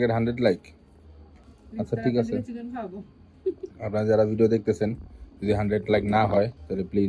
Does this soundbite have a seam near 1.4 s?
no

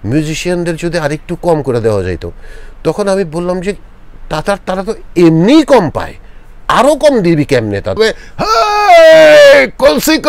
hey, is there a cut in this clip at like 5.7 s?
no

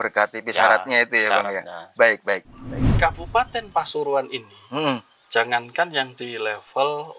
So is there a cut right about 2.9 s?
yes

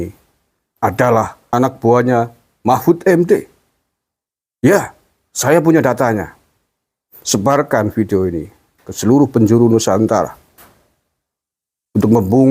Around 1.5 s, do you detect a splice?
yes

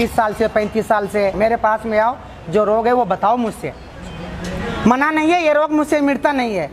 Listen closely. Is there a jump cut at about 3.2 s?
no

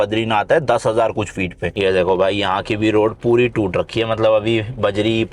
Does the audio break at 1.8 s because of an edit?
yes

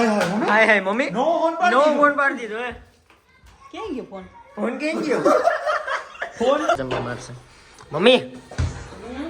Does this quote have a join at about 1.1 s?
no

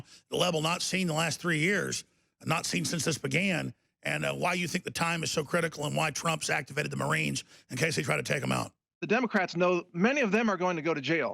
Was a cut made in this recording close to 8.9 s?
yes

